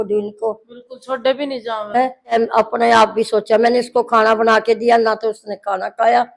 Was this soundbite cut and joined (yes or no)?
yes